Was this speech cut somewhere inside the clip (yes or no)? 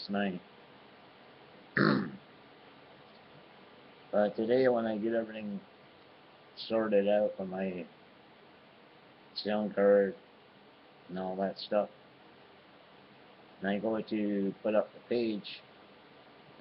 yes